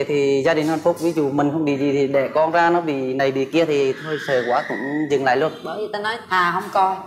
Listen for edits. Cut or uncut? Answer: uncut